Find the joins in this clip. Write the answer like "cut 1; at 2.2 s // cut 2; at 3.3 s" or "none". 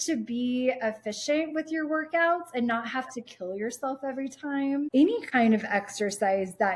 cut 1; at 4.9 s